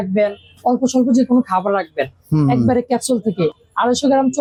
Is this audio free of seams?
yes; 0 cuts

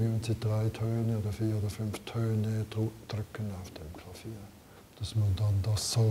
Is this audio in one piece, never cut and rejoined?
no; 1 cut; at 4.8 s

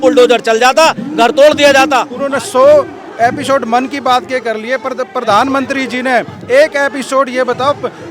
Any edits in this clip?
yes; 1 cut; at 2.1 s

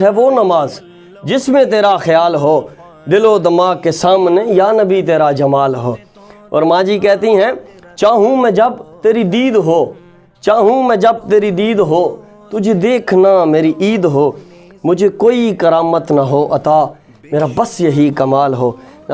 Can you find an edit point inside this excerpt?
no; 0 cuts

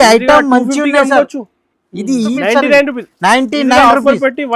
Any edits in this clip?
yes; 1 cut; at 2.3 s

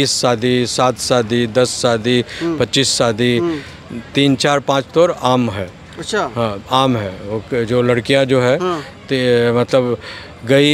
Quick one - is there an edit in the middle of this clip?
no; 0 cuts

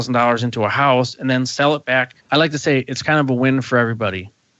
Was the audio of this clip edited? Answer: yes; 1 cut; at 2.2 s

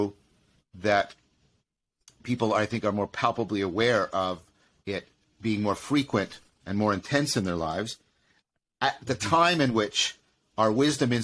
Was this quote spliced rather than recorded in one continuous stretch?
no; 0 cuts

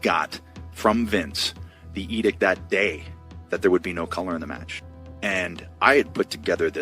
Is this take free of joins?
yes; 0 cuts

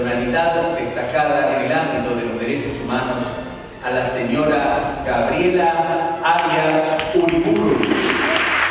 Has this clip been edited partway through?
no; 0 cuts

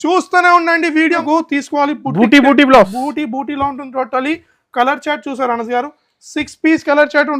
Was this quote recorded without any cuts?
no; 1 cut; at 1.2 s

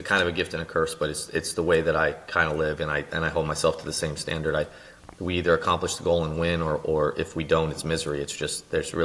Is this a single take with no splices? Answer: yes; 0 cuts

